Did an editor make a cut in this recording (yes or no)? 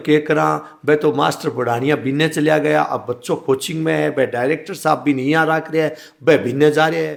no